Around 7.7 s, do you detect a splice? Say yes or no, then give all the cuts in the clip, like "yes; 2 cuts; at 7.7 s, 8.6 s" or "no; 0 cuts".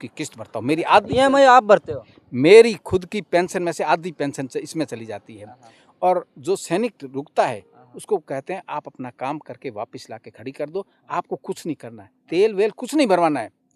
no; 0 cuts